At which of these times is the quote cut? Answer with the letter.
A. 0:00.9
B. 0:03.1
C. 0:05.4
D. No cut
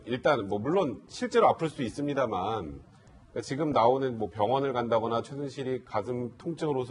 C